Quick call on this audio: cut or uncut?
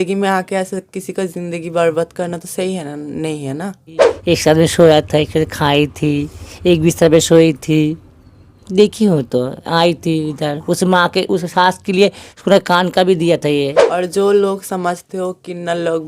cut